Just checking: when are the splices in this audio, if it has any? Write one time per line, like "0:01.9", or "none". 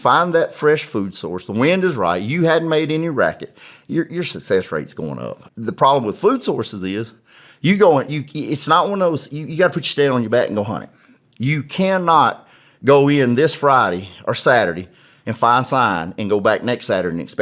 0:05.4